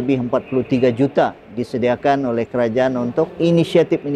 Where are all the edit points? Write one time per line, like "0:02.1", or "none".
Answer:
none

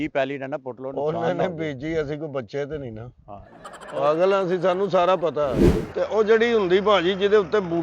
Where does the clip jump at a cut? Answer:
0:05.6

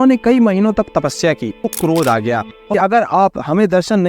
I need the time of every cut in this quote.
0:01.7
0:02.6

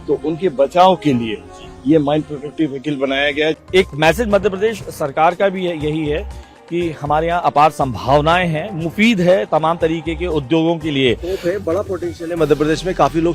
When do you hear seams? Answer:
0:03.6

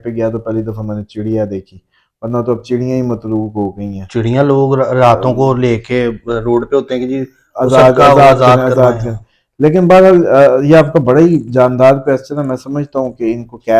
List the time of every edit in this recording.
none

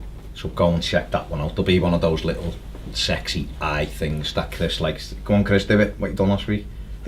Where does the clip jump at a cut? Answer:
0:04.8

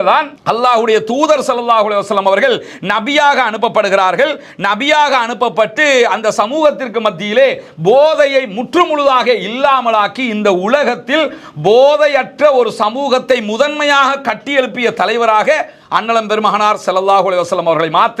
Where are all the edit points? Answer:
none

